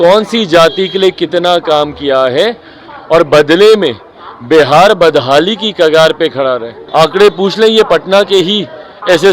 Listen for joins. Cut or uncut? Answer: cut